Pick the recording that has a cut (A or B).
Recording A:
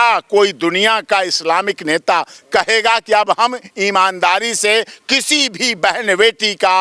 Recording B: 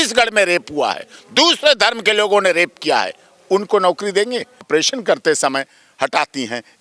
B